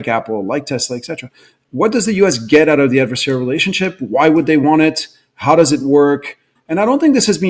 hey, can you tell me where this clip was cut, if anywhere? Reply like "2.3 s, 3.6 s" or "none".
none